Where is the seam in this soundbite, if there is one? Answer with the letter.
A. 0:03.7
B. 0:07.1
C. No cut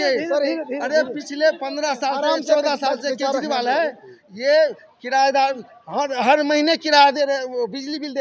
C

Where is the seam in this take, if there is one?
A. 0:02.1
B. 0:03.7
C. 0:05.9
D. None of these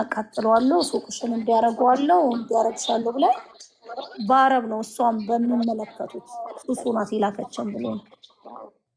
D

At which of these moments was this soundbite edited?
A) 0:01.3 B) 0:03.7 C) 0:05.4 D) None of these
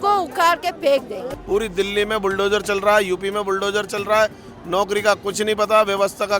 A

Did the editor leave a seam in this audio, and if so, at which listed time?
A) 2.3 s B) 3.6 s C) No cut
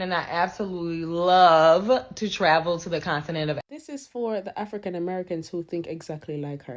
B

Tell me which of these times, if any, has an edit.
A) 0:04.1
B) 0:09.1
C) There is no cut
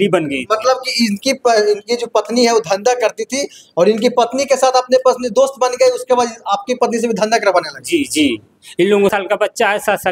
B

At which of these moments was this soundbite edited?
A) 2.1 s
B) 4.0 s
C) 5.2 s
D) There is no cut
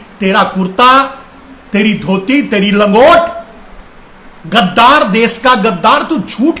D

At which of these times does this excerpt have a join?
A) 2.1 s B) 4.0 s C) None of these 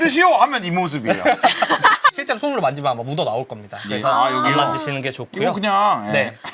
A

